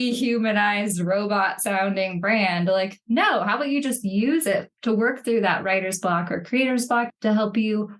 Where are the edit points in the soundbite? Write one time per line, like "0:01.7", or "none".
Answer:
none